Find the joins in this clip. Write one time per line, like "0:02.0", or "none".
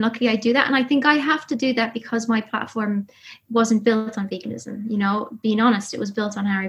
none